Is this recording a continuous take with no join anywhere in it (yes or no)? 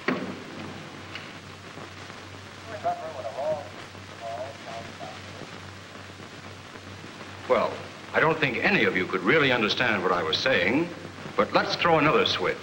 no